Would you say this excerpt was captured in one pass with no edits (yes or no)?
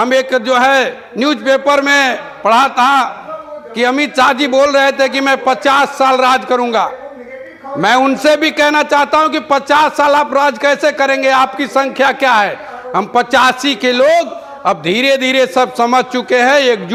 yes